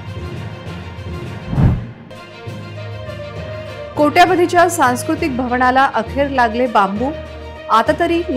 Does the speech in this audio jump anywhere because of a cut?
no; 0 cuts

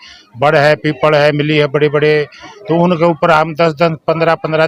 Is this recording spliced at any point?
no; 0 cuts

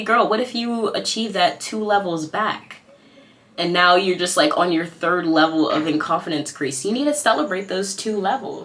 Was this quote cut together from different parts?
no; 0 cuts

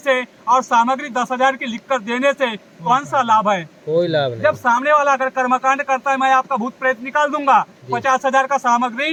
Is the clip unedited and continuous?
yes; 0 cuts

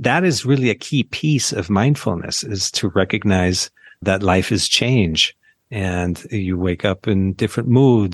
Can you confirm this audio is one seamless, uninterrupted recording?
yes; 0 cuts

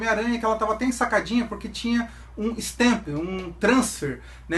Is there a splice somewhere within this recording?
yes; 1 cut; at 2.0 s

